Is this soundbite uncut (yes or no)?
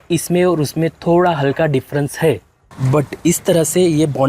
no